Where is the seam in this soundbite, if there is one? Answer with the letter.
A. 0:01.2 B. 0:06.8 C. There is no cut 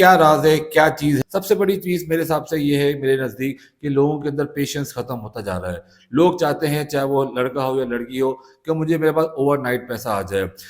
A